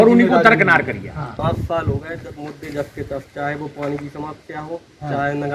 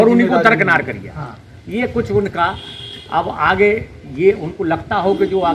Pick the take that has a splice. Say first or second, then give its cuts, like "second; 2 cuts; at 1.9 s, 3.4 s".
first; 1 cut; at 1.4 s